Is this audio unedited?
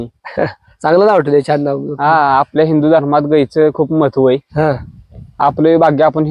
yes; 0 cuts

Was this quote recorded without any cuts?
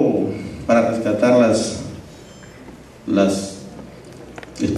no; 1 cut; at 3.8 s

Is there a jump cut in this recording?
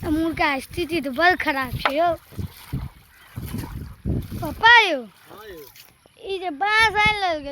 no; 0 cuts

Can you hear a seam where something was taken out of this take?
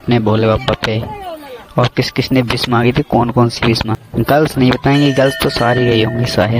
yes; 1 cut; at 3.9 s

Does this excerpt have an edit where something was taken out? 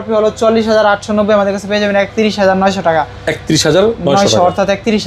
no; 0 cuts

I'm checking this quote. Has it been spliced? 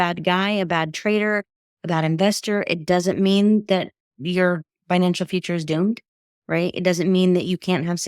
no; 0 cuts

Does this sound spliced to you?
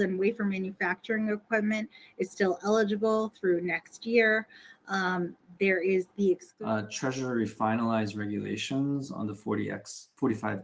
yes; 1 cut; at 6.5 s

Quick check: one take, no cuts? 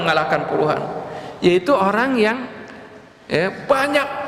yes; 0 cuts

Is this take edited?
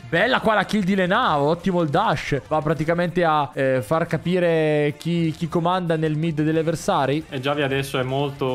yes; 1 cut; at 7.2 s

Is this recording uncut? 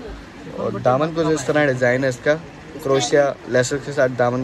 yes; 0 cuts

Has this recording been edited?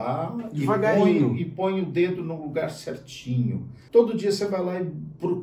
yes; 1 cut; at 3.7 s

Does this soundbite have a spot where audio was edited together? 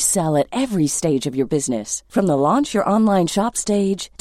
no; 0 cuts

